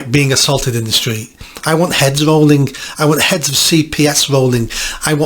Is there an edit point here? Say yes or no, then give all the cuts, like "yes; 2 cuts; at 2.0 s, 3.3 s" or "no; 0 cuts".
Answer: yes; 1 cut; at 1.4 s